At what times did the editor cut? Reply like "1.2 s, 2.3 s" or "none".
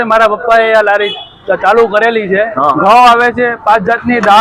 2.7 s